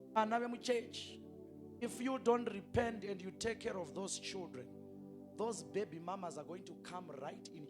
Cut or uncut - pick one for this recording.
uncut